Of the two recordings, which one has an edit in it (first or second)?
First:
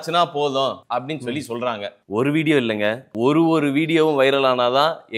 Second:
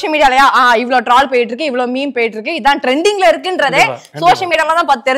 first